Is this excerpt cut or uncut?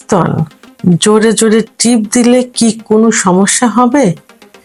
uncut